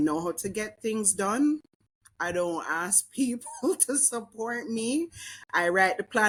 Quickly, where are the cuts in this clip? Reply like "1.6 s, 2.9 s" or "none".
none